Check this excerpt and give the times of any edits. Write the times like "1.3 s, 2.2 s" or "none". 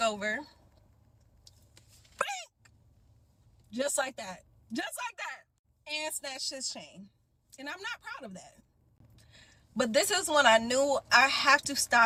none